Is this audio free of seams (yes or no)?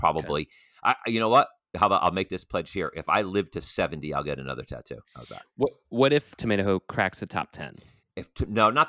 no